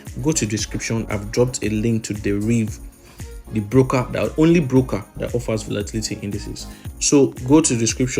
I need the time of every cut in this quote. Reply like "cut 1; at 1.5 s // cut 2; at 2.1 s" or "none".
cut 1; at 1.0 s // cut 2; at 6.9 s